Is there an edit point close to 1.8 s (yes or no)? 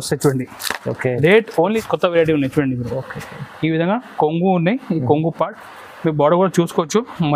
yes